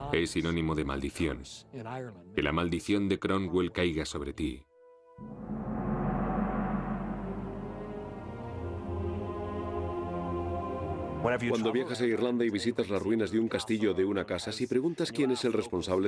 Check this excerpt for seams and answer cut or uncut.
cut